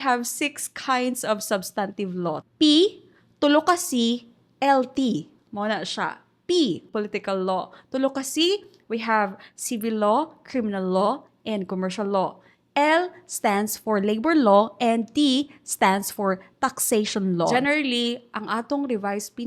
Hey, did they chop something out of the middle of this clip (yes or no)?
yes